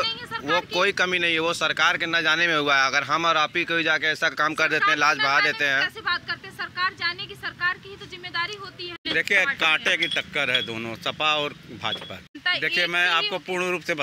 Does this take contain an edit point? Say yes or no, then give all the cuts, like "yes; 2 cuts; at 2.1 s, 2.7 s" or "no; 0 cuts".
yes; 2 cuts; at 9.0 s, 12.3 s